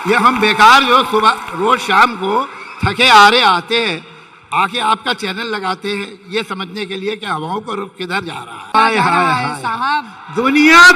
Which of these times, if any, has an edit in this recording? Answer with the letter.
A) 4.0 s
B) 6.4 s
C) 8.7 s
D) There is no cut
C